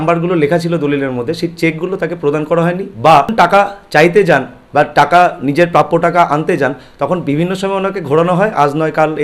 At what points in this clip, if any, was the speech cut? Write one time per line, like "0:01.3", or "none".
0:03.3